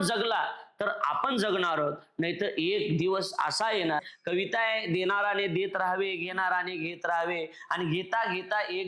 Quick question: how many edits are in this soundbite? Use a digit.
1